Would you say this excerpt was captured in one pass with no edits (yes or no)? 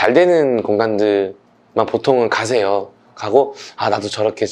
yes